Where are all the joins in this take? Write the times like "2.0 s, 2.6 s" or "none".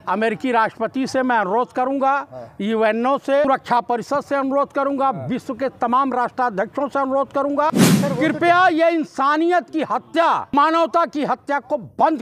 3.5 s, 7.7 s, 10.5 s

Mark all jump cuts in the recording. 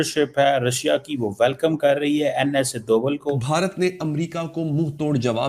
3.4 s

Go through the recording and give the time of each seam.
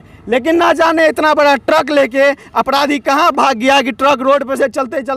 none

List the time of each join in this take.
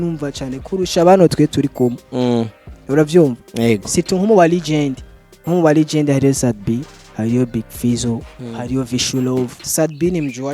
9.6 s

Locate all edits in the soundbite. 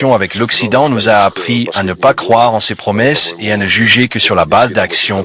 none

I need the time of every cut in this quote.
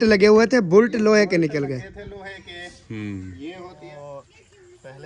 3.8 s

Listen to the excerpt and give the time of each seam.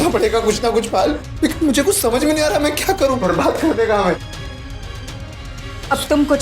3.2 s

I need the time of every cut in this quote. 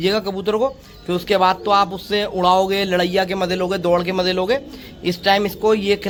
none

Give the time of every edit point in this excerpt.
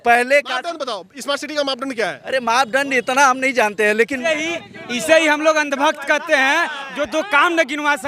4.2 s

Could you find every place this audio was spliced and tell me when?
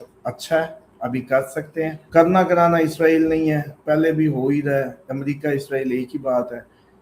2.0 s

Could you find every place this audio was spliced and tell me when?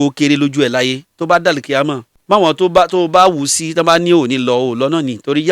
2.1 s

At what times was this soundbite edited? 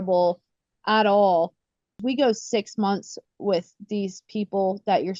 2.0 s

